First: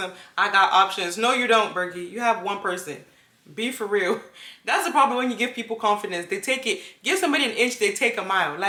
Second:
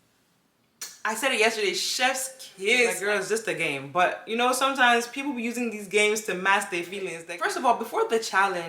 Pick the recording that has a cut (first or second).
second